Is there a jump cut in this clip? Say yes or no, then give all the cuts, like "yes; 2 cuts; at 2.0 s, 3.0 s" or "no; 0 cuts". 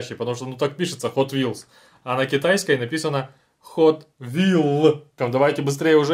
yes; 1 cut; at 5.1 s